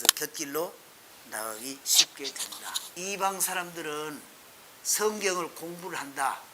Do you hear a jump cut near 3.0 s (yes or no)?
yes